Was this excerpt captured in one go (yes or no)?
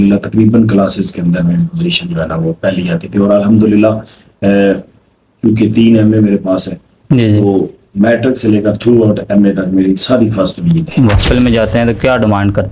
no